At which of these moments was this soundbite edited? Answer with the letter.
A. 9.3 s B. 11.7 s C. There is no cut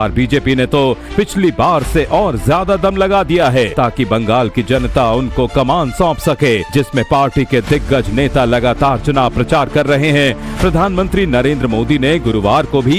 B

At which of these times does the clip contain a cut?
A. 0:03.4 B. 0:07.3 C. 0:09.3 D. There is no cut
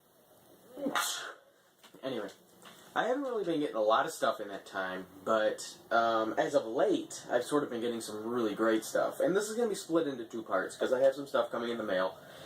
A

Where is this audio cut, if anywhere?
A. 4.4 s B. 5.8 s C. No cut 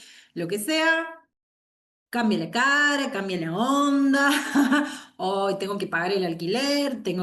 C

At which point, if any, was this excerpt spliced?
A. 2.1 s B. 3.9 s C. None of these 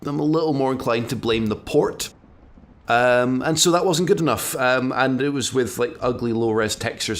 C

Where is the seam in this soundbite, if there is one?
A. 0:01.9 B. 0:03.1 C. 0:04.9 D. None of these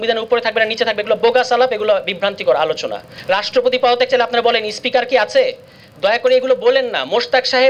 B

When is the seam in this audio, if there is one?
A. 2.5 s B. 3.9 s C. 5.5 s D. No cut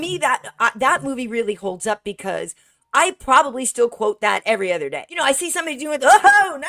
D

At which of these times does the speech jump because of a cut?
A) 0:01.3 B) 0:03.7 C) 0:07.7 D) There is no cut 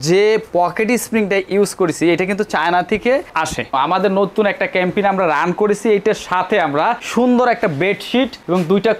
B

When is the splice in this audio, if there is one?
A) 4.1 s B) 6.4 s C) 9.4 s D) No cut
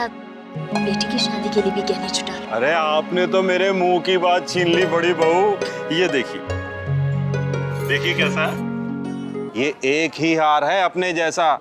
C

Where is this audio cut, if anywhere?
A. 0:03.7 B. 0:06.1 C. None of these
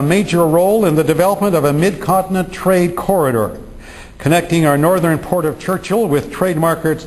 A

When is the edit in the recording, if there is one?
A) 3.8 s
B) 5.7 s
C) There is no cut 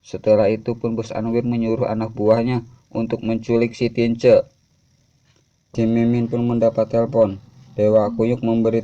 B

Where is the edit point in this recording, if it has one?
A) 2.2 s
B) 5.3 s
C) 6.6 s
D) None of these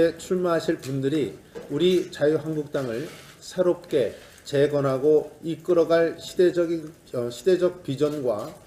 D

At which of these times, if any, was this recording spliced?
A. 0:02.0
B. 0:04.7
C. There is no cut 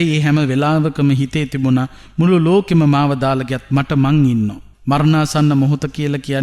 B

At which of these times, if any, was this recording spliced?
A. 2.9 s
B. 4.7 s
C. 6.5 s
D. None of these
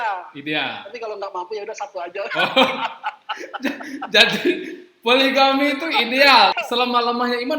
C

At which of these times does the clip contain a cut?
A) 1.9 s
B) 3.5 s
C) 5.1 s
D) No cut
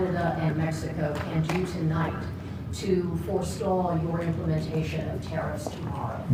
D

